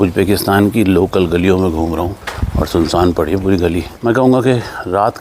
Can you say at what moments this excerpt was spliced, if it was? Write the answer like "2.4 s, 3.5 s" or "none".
2.2 s, 3.9 s